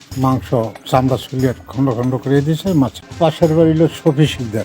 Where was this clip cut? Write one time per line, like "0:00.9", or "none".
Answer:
0:03.0